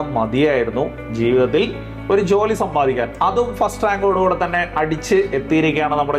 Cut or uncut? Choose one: uncut